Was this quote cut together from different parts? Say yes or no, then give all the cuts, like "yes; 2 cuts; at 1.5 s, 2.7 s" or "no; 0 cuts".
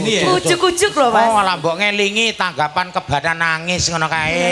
no; 0 cuts